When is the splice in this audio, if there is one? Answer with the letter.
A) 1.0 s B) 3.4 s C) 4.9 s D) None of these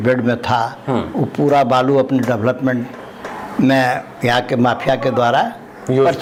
D